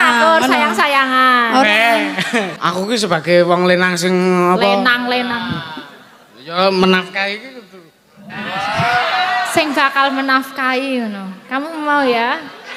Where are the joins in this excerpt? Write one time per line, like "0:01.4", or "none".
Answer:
0:02.6